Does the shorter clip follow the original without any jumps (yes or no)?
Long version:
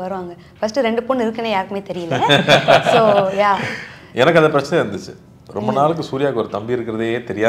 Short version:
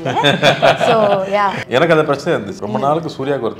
no